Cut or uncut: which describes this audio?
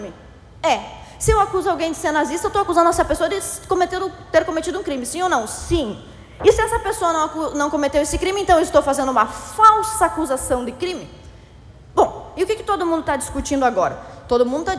uncut